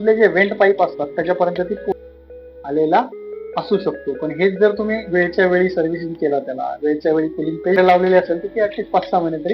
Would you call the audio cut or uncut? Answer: cut